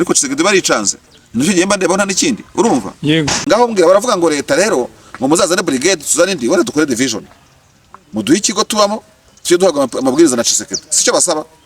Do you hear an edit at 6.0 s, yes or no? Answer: no